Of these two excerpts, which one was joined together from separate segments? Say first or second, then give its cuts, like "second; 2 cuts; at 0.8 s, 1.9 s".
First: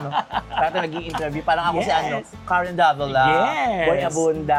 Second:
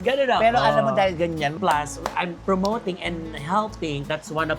second; 1 cut; at 1.6 s